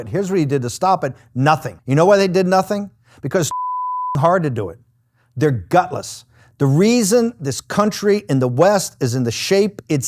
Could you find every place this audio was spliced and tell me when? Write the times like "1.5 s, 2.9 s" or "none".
1.7 s